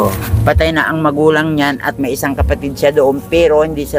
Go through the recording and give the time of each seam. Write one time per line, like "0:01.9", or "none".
none